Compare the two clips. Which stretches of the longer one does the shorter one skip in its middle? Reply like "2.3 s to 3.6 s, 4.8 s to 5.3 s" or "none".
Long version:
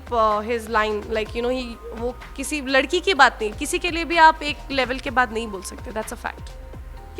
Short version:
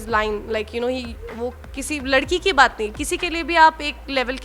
none